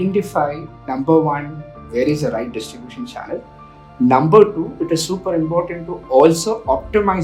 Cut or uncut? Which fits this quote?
uncut